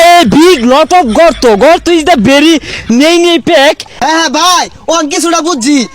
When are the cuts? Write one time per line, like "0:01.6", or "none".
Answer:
0:03.9